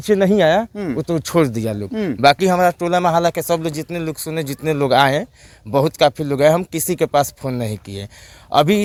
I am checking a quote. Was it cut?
no; 0 cuts

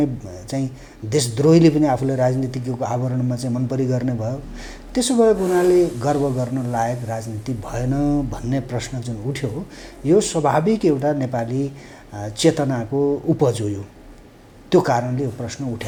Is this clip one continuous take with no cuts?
yes; 0 cuts

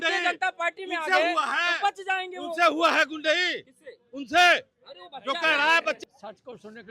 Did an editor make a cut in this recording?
yes; 1 cut; at 6.0 s

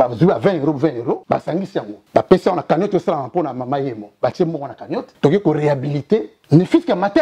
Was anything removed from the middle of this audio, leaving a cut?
yes; 3 cuts; at 1.4 s, 5.1 s, 6.3 s

